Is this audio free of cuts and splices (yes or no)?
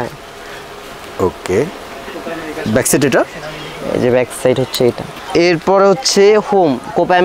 no